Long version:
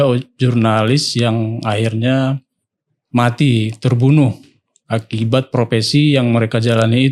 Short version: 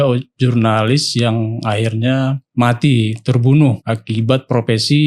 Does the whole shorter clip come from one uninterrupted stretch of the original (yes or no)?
no